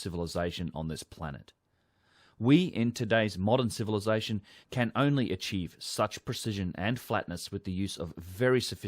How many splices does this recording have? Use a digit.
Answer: 1